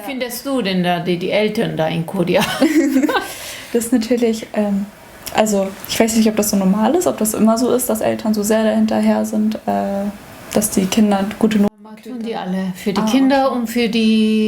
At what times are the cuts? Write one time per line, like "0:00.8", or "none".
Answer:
0:11.7